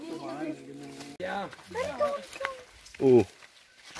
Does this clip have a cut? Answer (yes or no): yes